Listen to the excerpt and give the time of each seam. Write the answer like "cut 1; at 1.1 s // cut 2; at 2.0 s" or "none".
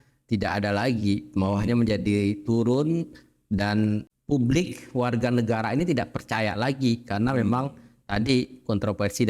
cut 1; at 4.1 s

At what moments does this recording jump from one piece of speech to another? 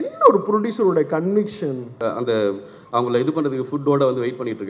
cut 1; at 1.9 s

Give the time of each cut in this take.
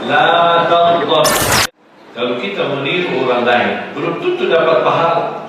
cut 1; at 1.5 s

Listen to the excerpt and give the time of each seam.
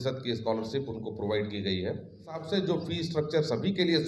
cut 1; at 2.5 s

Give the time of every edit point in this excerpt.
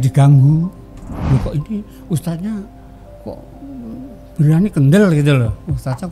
cut 1; at 1.1 s

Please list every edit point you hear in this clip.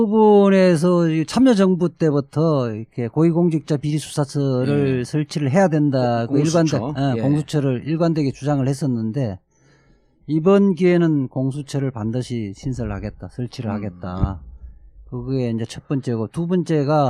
cut 1; at 9.5 s

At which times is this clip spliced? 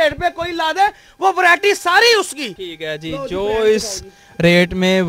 none

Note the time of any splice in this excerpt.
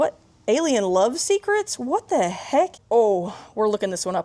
cut 1; at 2.8 s

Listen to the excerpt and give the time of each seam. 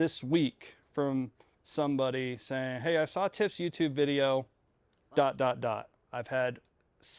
none

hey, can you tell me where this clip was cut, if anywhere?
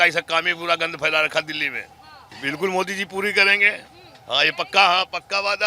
cut 1; at 2.3 s

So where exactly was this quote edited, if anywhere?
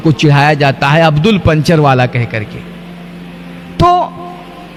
none

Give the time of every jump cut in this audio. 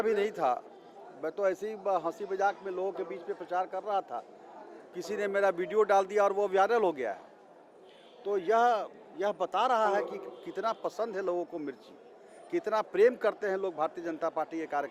none

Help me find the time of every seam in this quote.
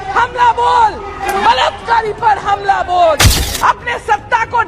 cut 1; at 1.1 s // cut 2; at 3.4 s

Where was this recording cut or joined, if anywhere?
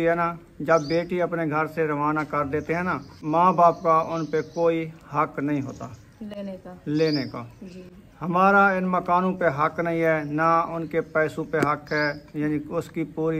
cut 1; at 3.1 s

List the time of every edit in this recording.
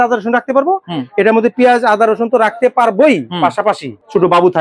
none

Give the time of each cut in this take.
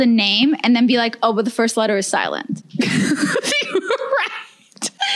none

